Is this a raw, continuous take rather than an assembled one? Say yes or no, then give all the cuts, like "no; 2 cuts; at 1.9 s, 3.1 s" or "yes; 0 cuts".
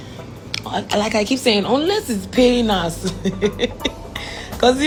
yes; 0 cuts